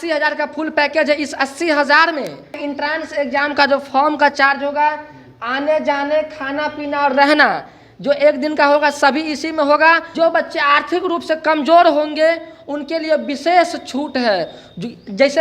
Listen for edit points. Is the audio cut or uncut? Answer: cut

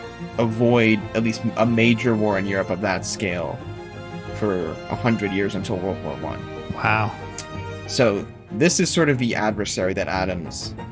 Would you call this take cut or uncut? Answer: uncut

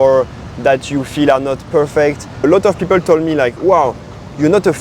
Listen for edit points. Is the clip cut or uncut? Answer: cut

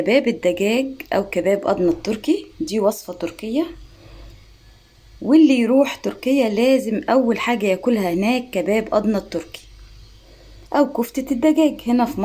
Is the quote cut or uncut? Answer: uncut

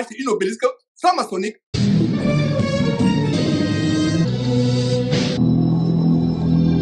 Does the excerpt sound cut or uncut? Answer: cut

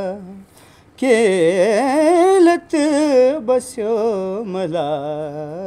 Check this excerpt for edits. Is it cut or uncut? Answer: uncut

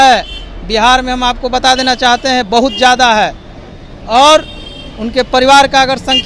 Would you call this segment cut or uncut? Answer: uncut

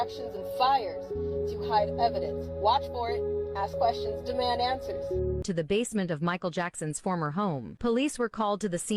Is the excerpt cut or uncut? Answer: cut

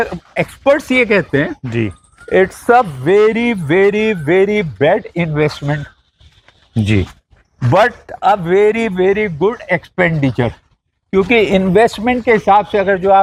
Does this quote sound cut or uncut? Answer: uncut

